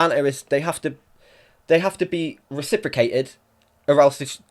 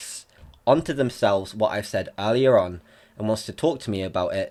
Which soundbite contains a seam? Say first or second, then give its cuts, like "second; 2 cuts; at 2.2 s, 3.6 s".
first; 1 cut; at 2.5 s